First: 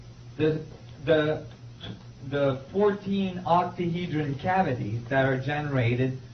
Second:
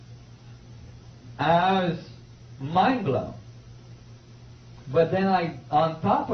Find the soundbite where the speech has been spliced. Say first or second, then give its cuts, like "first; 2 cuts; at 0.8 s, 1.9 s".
second; 1 cut; at 3.3 s